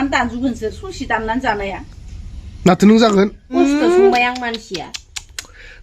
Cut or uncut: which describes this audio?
cut